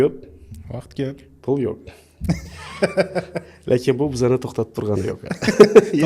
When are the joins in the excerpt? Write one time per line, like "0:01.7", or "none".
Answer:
none